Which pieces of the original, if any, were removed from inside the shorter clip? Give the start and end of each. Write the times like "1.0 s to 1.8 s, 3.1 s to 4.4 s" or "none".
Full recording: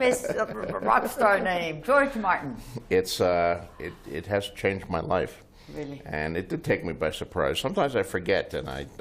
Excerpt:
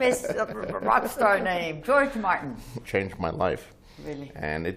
2.8 s to 4.5 s